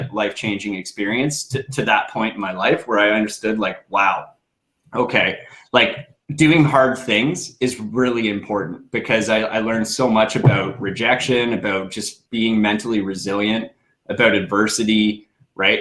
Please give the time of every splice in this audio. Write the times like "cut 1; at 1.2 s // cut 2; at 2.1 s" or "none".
none